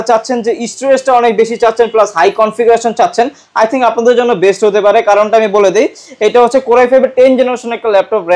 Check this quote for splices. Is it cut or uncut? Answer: uncut